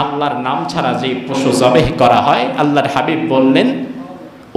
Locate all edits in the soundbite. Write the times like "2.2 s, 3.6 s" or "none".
none